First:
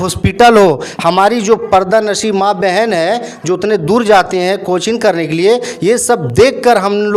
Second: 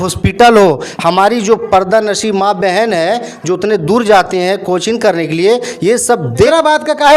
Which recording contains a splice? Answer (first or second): second